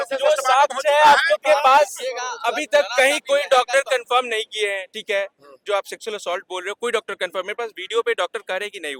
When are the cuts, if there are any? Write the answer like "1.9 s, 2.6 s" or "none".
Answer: none